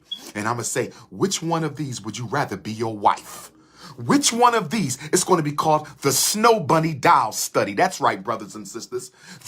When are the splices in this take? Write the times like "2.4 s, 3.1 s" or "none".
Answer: none